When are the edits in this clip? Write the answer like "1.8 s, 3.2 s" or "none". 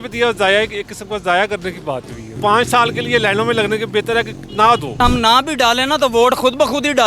2.2 s, 5.0 s